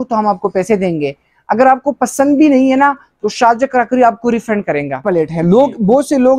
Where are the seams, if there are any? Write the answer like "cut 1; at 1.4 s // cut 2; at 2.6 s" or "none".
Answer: cut 1; at 5.0 s